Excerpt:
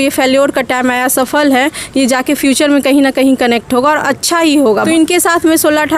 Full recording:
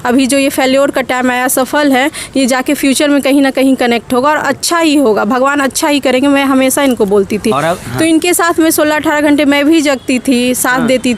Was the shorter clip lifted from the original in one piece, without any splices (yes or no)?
no